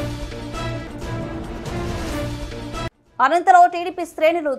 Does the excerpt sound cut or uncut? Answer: cut